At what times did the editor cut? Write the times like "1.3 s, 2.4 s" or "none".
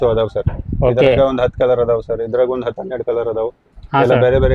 none